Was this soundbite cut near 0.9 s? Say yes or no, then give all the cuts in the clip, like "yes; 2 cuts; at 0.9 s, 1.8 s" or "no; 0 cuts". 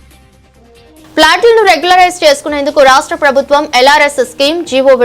yes; 1 cut; at 0.9 s